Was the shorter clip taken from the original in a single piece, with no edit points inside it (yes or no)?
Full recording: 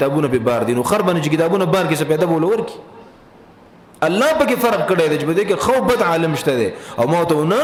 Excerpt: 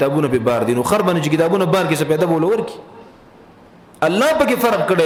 yes